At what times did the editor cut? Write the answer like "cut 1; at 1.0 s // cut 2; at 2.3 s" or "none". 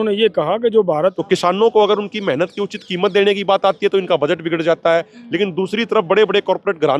cut 1; at 1.2 s

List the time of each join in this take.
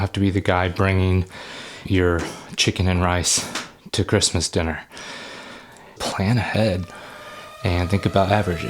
cut 1; at 1.8 s // cut 2; at 6.0 s

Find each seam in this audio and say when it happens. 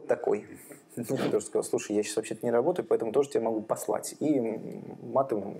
cut 1; at 1.3 s

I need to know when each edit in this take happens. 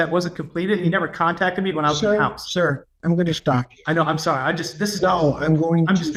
none

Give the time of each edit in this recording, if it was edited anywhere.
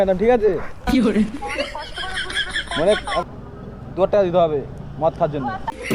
cut 1; at 3.2 s

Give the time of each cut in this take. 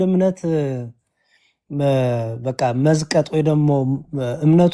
none

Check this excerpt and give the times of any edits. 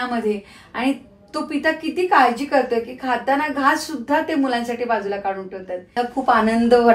cut 1; at 6.0 s

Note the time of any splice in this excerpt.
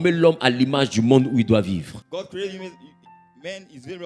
none

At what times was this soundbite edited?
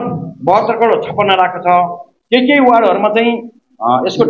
none

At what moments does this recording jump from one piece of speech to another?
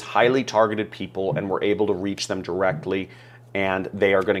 none

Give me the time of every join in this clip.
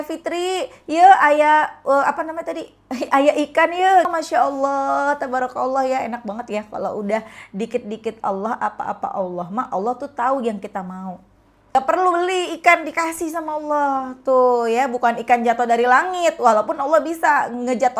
cut 1; at 4.1 s // cut 2; at 11.8 s

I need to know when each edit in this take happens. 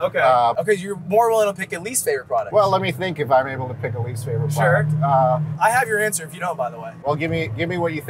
none

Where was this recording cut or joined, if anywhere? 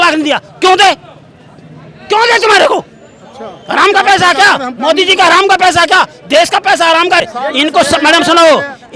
cut 1; at 7.2 s

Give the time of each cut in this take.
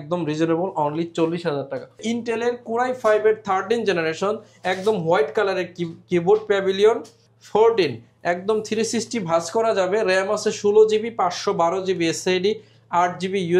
cut 1; at 2.0 s

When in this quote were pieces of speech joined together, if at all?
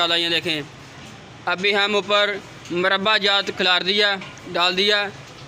none

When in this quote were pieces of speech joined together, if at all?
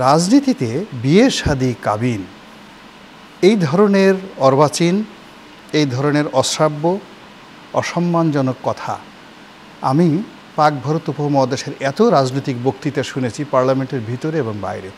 none

